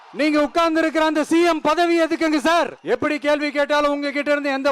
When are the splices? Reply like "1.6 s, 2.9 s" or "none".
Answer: 2.8 s

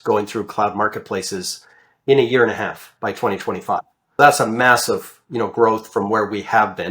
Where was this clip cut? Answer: 4.2 s

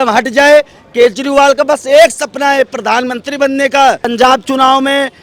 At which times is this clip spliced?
4.1 s

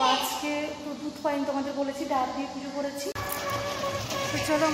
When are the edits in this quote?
3.1 s

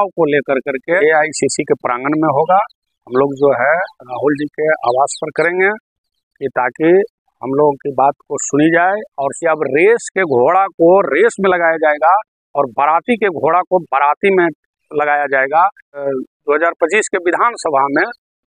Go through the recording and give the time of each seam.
1.0 s, 9.2 s, 16.0 s

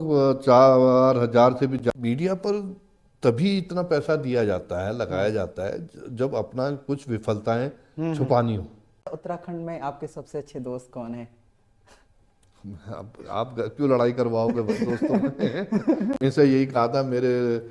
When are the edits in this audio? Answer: 1.9 s, 9.1 s, 16.2 s

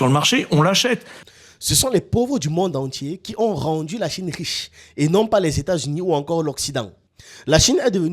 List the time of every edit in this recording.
1.1 s, 7.0 s

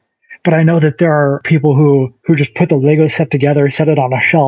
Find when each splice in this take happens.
1.4 s, 2.1 s

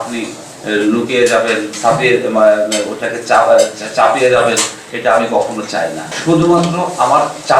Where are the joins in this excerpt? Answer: 6.1 s

